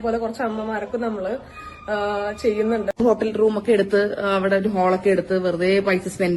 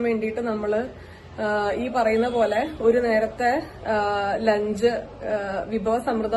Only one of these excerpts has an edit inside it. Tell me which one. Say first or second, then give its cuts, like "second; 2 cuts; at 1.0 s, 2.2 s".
first; 1 cut; at 2.9 s